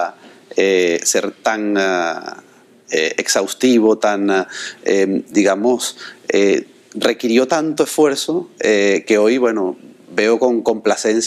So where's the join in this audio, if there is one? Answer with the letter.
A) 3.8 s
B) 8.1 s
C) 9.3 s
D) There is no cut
C